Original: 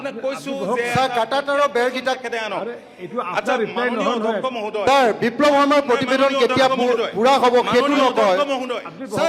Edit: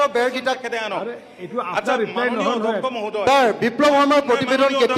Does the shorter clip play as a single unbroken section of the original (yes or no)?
yes